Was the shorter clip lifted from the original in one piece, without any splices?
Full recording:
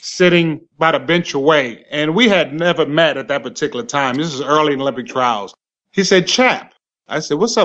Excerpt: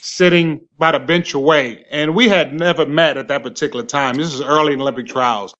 yes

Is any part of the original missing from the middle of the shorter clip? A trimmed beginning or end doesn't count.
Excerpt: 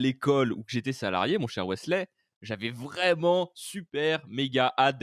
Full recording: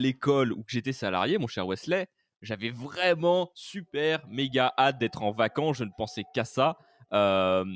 no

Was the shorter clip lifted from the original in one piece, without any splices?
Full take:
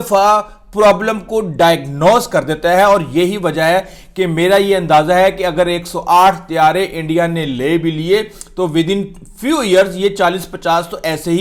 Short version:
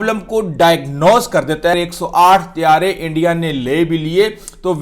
no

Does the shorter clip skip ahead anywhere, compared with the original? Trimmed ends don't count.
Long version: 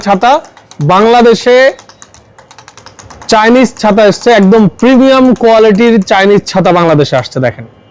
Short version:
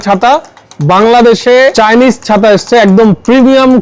yes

